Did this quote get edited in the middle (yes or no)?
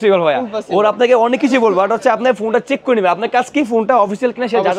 no